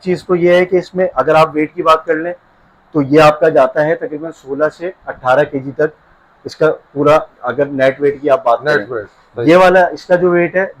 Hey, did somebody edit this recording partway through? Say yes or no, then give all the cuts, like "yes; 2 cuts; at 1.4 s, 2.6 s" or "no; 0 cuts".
no; 0 cuts